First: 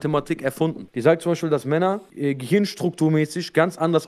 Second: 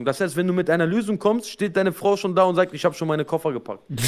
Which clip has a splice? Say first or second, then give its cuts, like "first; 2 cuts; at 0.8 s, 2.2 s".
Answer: first; 2 cuts; at 0.9 s, 2.1 s